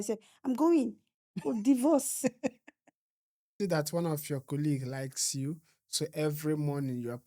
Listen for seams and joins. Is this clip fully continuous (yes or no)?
no